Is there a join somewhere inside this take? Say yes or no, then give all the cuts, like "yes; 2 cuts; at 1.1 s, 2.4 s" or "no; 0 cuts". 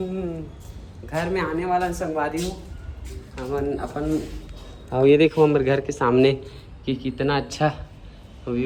no; 0 cuts